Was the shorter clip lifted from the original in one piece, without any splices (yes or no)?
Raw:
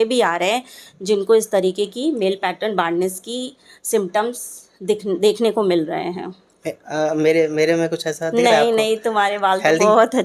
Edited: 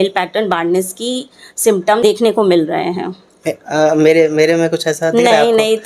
no